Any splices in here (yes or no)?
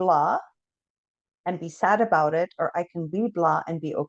no